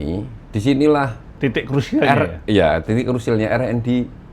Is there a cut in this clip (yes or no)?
yes